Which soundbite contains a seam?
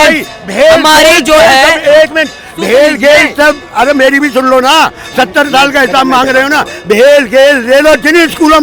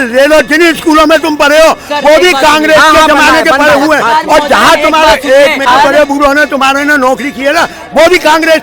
second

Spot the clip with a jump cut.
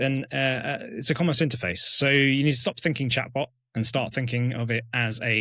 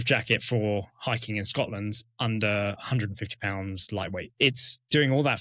second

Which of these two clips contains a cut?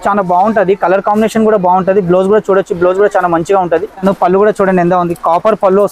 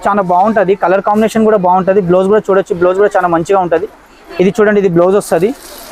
first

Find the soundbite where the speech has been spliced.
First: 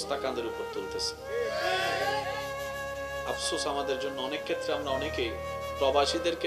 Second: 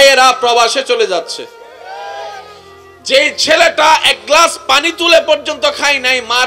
first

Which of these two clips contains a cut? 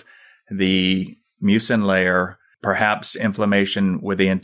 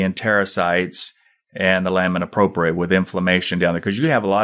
first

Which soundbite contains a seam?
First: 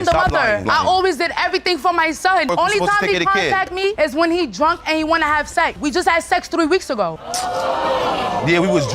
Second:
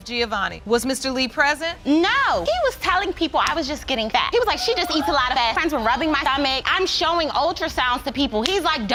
first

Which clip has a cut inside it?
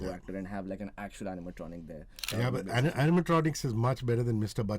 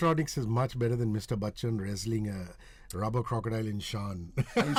first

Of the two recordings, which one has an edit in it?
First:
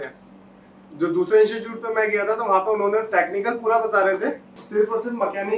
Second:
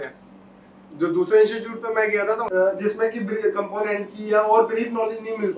second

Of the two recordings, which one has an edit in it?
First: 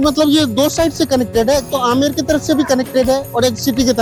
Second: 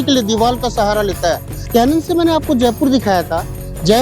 second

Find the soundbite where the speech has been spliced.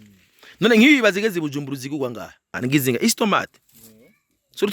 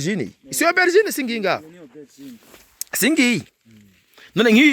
first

